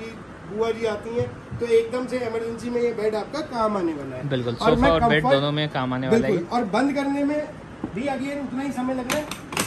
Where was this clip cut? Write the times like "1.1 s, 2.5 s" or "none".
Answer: none